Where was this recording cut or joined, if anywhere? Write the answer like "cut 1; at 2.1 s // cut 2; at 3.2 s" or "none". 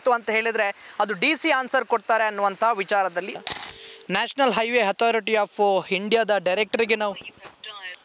cut 1; at 3.3 s